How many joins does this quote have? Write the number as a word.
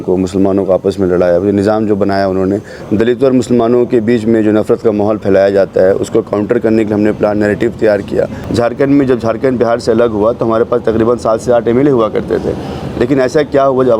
two